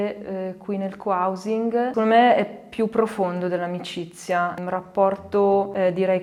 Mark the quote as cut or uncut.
uncut